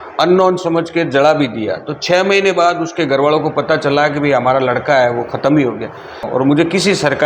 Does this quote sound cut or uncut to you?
cut